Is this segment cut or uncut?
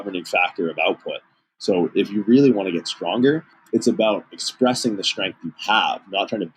cut